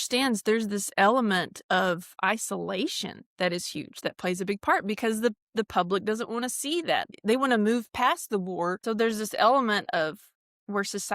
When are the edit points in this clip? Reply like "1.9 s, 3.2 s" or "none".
7.1 s, 8.8 s